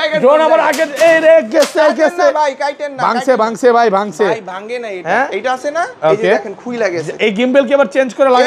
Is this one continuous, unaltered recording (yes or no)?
yes